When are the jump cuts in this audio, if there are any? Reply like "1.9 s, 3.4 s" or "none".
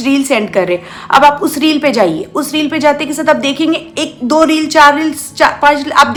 none